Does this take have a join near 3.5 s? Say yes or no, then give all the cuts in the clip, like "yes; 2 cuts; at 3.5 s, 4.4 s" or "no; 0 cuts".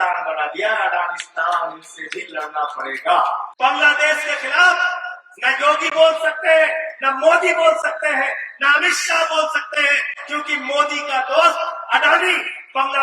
yes; 1 cut; at 3.5 s